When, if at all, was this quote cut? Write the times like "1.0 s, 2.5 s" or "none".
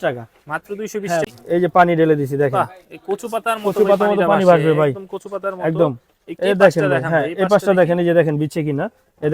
1.3 s

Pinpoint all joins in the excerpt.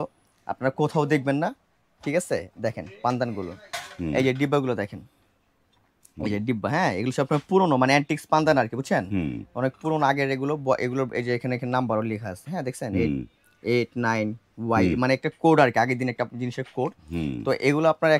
none

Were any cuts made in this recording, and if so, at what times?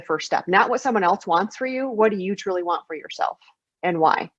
none

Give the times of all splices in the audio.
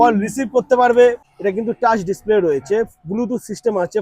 1.2 s

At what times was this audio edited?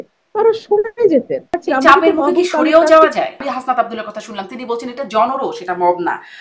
1.5 s, 3.4 s

